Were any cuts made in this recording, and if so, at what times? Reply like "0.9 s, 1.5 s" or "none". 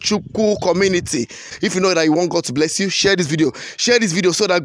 1.6 s